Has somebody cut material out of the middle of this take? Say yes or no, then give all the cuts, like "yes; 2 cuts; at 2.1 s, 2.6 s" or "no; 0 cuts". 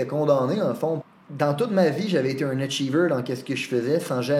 yes; 1 cut; at 1.0 s